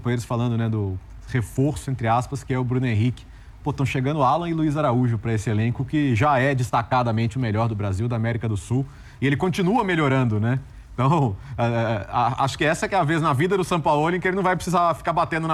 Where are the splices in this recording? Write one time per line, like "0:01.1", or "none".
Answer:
none